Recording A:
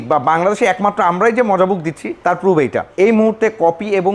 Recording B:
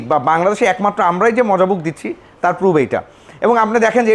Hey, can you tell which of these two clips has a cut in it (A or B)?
A